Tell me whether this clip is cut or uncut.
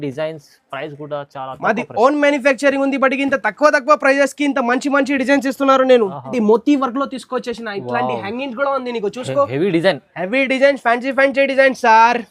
cut